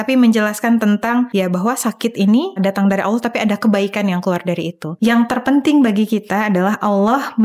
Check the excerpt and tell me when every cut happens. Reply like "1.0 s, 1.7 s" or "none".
1.3 s, 2.6 s, 4.8 s